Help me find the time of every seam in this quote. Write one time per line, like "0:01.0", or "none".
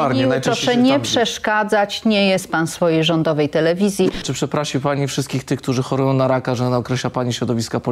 0:04.3